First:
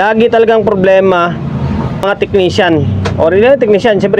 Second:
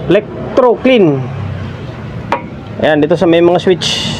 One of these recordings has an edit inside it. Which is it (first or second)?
first